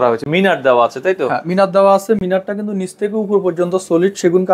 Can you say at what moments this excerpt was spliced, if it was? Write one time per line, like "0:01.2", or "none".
none